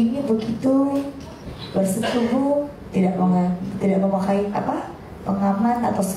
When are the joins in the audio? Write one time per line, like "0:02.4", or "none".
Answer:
none